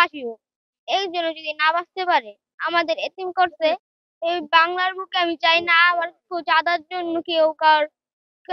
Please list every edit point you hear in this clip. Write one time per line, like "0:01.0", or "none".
none